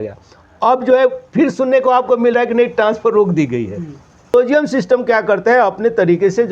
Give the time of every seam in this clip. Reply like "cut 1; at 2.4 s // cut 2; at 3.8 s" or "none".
cut 1; at 4.3 s